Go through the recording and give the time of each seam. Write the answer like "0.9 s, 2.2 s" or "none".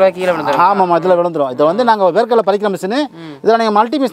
none